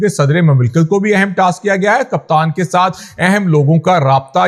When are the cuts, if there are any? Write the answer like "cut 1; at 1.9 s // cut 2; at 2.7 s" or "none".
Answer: none